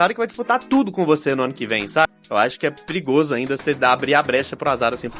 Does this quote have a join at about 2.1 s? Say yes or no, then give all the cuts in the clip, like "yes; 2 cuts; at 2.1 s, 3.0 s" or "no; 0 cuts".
yes; 1 cut; at 2.1 s